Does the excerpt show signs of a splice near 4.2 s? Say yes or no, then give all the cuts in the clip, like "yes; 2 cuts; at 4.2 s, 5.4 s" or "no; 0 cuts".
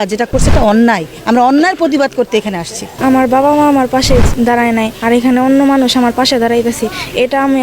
no; 1 cut; at 2.9 s